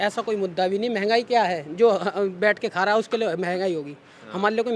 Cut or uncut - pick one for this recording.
uncut